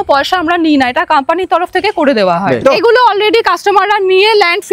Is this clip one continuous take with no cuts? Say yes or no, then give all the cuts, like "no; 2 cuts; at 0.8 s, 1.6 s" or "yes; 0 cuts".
no; 1 cut; at 2.6 s